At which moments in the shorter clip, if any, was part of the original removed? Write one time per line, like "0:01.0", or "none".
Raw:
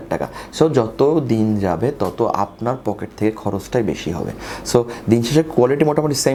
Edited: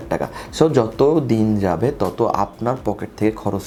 none